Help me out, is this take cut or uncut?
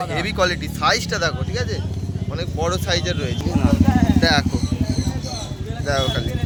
uncut